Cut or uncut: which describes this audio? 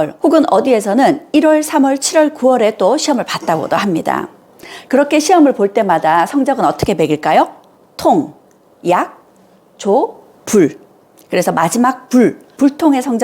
uncut